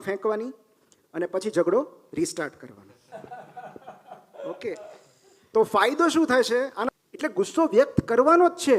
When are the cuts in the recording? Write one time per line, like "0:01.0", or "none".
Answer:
0:03.1
0:06.9

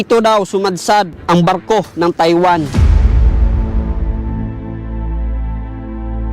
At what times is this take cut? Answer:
0:02.7

